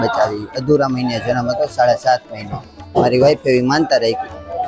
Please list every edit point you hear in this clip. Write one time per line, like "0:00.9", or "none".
0:02.8